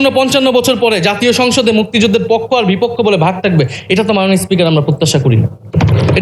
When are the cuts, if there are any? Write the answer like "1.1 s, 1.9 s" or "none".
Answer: none